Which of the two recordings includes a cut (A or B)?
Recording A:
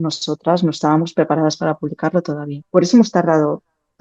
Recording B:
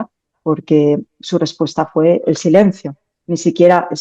A